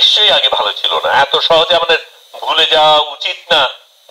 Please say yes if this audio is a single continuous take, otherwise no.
yes